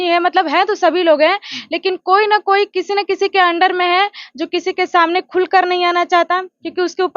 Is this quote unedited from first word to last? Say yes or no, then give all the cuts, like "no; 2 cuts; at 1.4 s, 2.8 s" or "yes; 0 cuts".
yes; 0 cuts